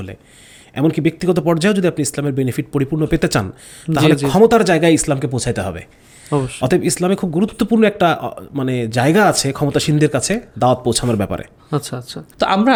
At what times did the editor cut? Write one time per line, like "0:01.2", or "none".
none